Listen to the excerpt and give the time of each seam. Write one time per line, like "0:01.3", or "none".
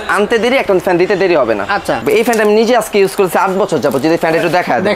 0:02.0

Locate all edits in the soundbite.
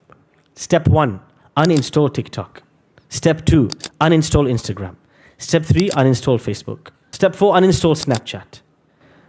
none

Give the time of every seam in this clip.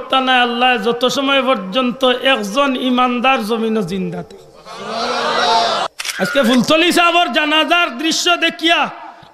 0:05.9

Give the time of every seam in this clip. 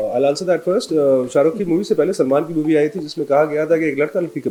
none

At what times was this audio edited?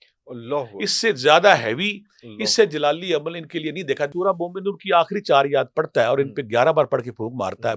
0:04.1

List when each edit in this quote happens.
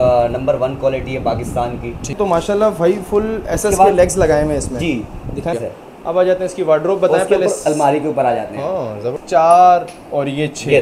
0:02.1
0:05.5
0:09.1

